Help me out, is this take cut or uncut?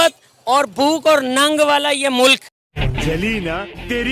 uncut